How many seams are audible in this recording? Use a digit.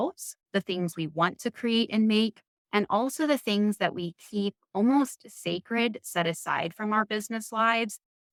0